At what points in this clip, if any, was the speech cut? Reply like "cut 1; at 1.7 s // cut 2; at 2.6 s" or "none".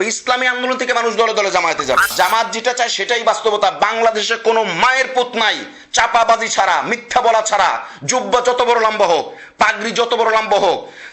cut 1; at 2.1 s